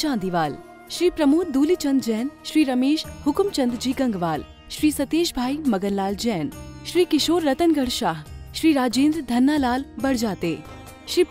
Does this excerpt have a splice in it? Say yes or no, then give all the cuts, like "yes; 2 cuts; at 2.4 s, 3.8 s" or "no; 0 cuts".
no; 0 cuts